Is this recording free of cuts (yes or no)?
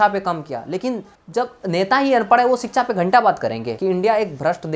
no